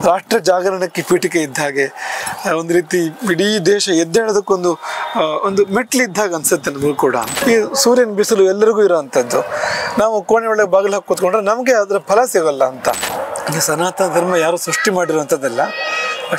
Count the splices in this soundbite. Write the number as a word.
two